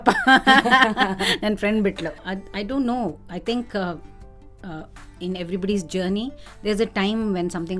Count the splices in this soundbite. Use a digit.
1